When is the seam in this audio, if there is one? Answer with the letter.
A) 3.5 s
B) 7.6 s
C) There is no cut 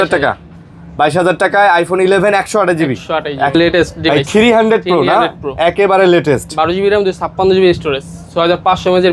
A